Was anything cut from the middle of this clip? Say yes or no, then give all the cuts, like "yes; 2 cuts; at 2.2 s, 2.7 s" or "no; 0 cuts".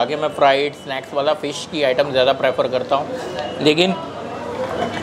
no; 0 cuts